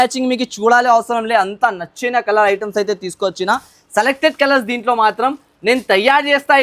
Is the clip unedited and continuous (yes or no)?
yes